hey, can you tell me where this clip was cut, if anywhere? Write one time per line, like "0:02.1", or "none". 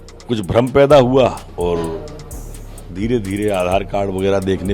0:01.4